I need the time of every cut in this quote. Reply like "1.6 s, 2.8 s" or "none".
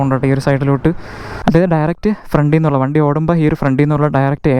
1.4 s